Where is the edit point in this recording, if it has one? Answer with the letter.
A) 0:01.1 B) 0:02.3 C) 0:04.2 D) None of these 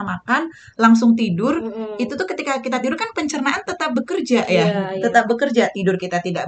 D